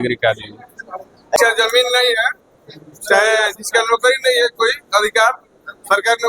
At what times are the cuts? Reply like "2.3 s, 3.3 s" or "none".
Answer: 1.4 s